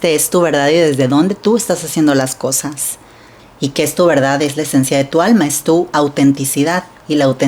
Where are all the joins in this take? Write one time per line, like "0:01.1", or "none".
0:03.0